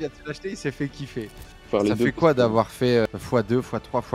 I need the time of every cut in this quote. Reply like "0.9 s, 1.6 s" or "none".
1.6 s, 3.1 s

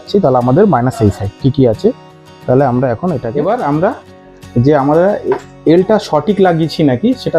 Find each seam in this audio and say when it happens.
3.2 s

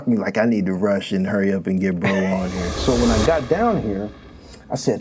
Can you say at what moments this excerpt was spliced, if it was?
2.8 s

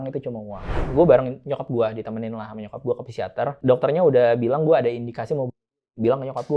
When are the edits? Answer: 0.9 s, 3.5 s

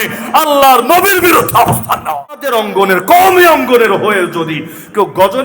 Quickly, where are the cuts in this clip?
2.5 s

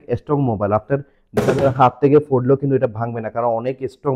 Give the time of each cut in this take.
none

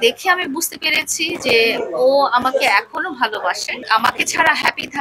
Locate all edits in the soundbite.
3.8 s

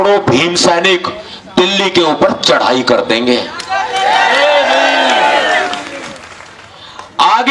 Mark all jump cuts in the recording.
none

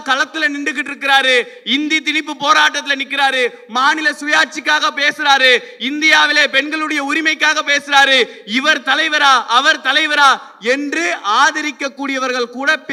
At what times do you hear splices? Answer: none

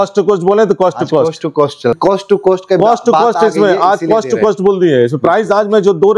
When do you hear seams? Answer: 2.0 s

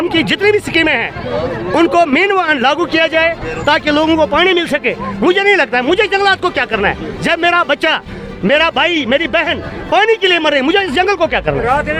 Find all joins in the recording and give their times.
none

